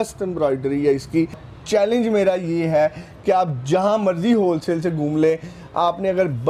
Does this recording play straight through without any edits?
no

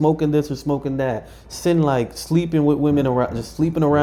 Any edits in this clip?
no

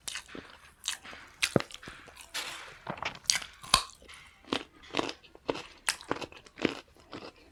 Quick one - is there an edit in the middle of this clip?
no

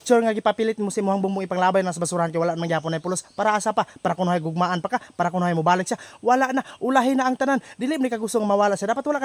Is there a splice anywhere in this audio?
no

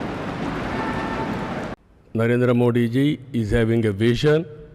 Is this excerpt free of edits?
no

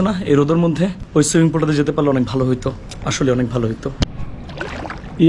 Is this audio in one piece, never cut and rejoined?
no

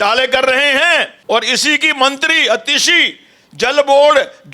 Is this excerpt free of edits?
no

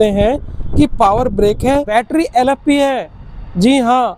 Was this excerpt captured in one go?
no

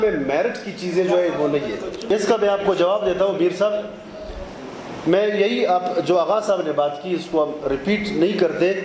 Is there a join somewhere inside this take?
no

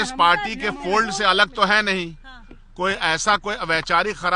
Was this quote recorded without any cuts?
yes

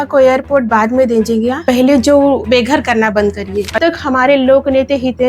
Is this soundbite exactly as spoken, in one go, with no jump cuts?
no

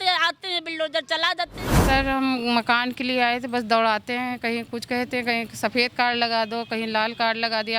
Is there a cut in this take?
yes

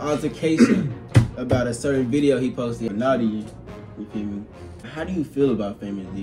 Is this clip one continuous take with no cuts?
no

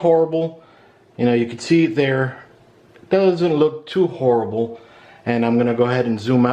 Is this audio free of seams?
yes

